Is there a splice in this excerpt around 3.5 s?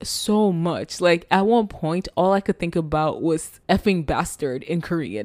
yes; 1 cut; at 3.5 s

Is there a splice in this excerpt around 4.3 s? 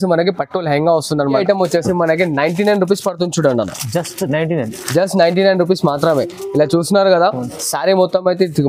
no; 1 cut; at 1.4 s

